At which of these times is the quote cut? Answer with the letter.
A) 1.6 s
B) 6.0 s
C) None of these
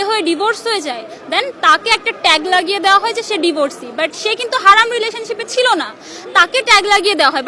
C